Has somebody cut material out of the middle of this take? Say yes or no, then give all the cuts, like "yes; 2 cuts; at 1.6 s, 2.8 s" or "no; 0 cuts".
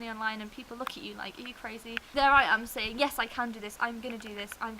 yes; 1 cut; at 2.1 s